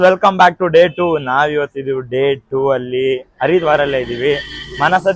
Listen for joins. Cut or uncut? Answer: uncut